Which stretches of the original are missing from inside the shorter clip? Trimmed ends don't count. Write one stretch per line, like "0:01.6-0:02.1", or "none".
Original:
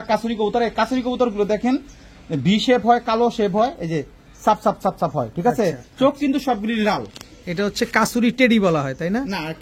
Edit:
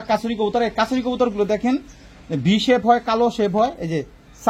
none